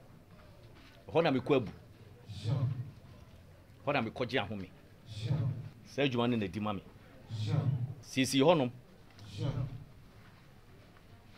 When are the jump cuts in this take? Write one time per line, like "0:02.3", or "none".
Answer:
0:05.8
0:08.0